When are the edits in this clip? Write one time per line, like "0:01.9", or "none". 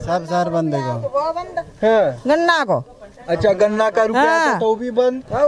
none